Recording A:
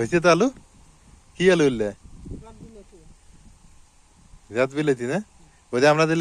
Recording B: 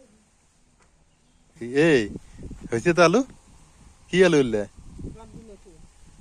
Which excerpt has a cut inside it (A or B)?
B